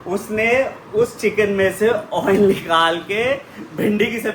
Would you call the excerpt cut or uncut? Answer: uncut